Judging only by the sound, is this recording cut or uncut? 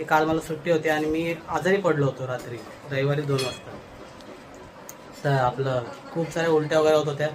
uncut